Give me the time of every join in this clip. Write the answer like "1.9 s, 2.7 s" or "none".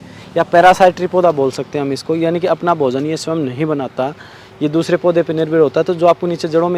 none